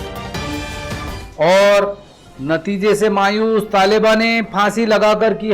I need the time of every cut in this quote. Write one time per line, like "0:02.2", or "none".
0:01.2